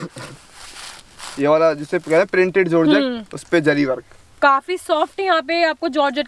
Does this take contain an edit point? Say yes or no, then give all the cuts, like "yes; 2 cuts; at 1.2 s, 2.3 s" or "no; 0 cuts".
no; 0 cuts